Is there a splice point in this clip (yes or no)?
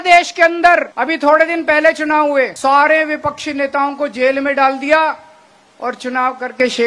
yes